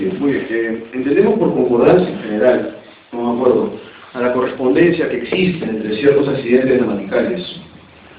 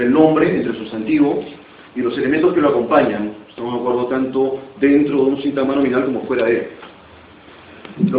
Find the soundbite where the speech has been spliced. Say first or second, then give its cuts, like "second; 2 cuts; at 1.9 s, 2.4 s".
first; 1 cut; at 6.8 s